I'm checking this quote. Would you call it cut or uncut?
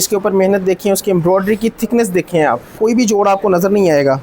cut